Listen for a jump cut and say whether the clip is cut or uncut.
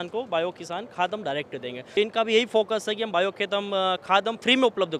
cut